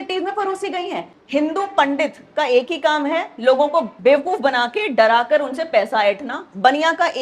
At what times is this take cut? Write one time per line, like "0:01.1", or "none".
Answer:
0:01.1
0:03.9